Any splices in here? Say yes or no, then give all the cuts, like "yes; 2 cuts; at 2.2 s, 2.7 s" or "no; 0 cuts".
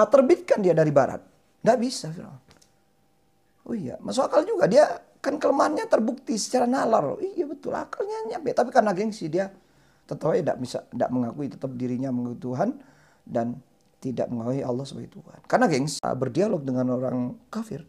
yes; 1 cut; at 16.0 s